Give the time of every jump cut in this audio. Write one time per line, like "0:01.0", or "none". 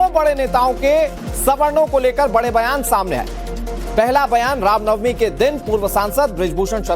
0:05.0